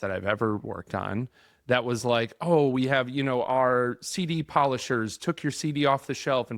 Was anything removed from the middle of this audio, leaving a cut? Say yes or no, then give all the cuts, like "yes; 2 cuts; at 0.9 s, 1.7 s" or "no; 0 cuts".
no; 0 cuts